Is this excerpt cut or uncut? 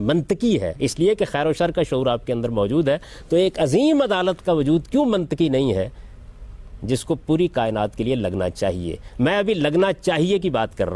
uncut